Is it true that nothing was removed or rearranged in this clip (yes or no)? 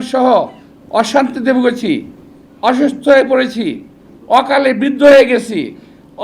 yes